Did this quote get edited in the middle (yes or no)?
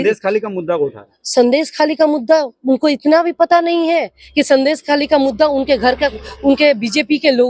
no